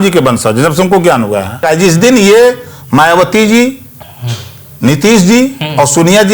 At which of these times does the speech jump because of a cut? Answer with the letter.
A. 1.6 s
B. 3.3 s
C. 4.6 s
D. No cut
A